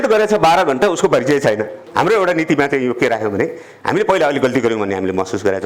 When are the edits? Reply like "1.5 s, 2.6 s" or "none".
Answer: 1.7 s